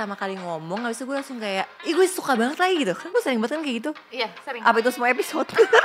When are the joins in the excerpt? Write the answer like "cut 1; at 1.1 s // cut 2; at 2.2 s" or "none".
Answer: cut 1; at 1.8 s